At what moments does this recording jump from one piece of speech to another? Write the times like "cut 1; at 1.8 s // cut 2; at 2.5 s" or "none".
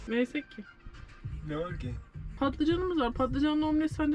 cut 1; at 2.3 s